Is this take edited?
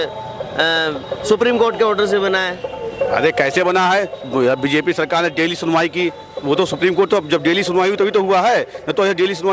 no; 0 cuts

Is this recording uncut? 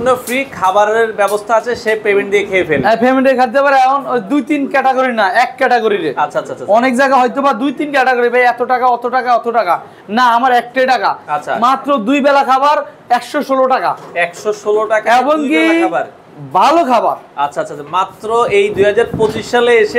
yes; 0 cuts

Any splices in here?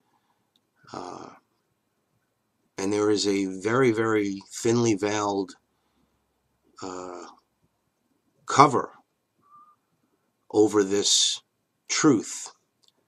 no; 0 cuts

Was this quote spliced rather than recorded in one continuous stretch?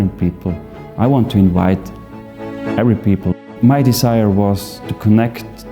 no; 0 cuts

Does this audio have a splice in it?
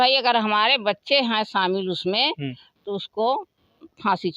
no; 0 cuts

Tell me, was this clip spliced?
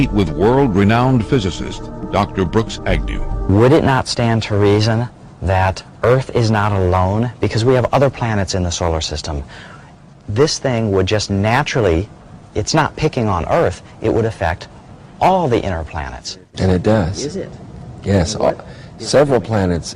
no; 0 cuts

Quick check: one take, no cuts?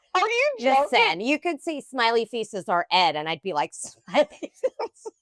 yes; 0 cuts

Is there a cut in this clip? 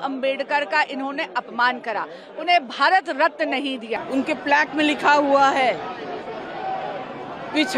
yes; 1 cut; at 3.9 s

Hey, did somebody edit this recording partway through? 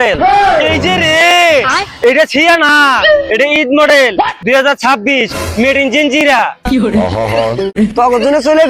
yes; 1 cut; at 7.8 s

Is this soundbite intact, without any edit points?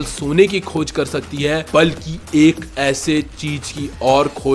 no; 1 cut; at 1.6 s

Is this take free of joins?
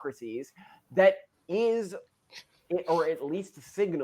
yes; 0 cuts

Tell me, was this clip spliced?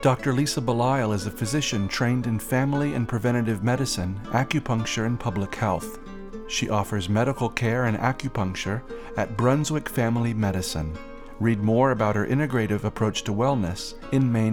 no; 0 cuts

